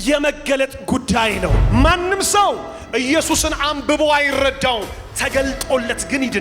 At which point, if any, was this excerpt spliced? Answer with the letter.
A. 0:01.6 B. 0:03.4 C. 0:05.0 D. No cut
A